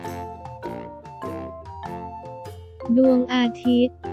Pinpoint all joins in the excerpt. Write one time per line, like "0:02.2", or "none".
0:02.2